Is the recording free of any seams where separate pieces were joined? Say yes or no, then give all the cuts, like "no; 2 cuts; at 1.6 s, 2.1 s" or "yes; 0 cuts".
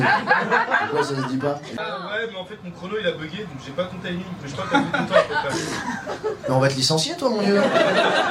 no; 1 cut; at 1.7 s